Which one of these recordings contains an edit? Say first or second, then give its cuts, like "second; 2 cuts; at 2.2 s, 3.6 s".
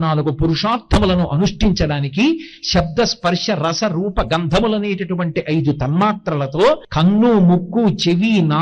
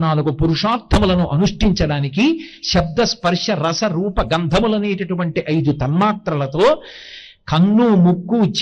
first; 1 cut; at 6.9 s